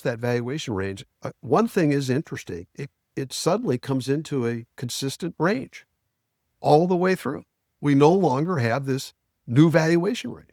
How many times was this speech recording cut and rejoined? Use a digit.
0